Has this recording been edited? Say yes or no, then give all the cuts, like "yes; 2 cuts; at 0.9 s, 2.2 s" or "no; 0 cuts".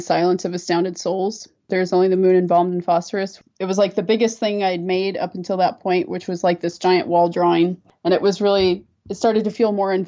yes; 1 cut; at 7.9 s